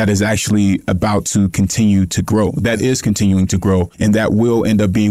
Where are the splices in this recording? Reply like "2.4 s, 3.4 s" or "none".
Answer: 3.9 s